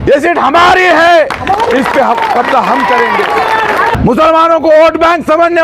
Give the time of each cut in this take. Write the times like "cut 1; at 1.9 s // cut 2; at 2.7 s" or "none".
cut 1; at 3.9 s